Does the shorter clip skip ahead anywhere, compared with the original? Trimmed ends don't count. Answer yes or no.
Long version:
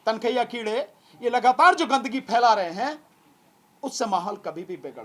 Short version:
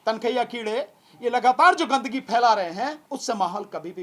yes